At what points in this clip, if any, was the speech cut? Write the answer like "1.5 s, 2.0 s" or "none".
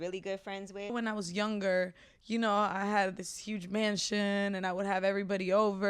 0.9 s